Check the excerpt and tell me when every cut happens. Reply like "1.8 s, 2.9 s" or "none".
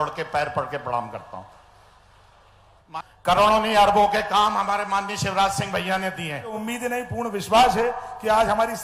2.8 s, 6.5 s